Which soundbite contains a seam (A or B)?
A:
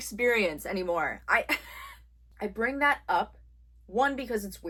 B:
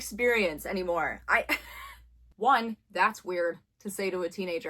B